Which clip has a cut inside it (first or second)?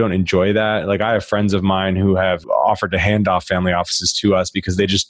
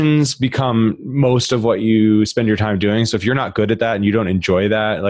first